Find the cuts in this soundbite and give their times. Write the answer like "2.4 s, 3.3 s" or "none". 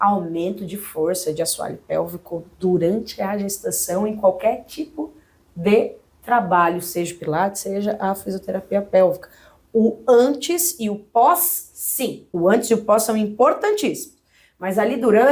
12.2 s